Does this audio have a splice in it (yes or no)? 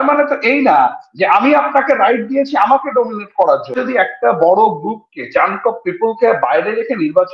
yes